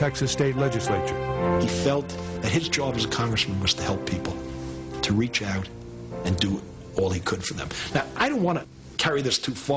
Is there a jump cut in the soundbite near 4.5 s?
yes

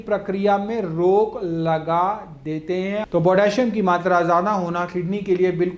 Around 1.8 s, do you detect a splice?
no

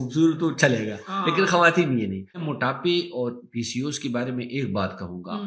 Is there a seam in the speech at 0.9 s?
no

